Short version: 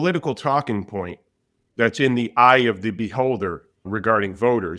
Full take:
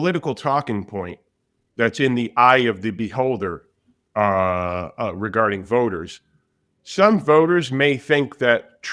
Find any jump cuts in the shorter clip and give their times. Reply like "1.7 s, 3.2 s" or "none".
3.9 s